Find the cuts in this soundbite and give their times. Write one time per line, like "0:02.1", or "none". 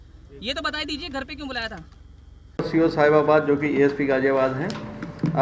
0:02.4